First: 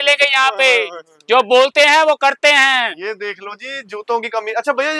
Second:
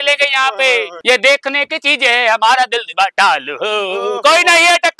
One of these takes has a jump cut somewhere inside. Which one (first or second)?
second